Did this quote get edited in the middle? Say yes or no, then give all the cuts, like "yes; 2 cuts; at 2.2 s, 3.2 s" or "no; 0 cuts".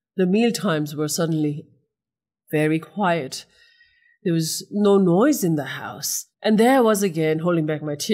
yes; 1 cut; at 6.3 s